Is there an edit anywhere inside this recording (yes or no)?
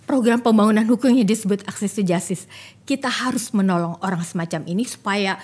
no